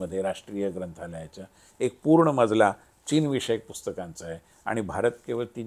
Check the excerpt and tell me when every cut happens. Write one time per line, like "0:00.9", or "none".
none